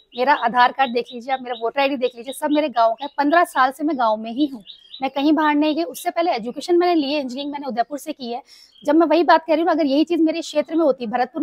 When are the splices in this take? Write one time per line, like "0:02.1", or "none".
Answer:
none